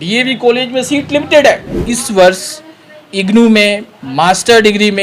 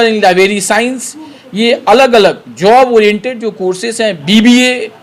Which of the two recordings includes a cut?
first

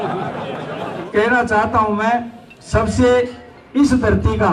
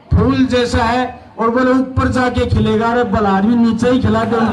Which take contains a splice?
first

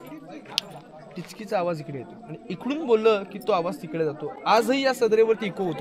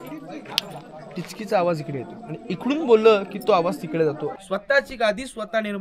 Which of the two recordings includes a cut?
second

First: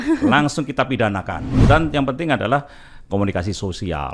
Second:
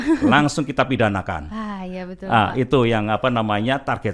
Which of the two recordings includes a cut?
first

